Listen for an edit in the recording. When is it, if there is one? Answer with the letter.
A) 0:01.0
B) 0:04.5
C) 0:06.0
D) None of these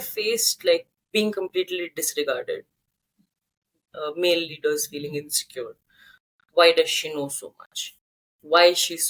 A